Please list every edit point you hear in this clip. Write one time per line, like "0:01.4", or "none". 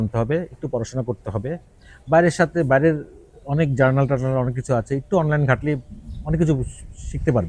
none